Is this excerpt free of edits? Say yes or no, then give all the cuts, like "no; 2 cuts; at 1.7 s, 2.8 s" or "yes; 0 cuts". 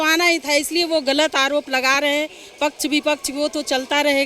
yes; 0 cuts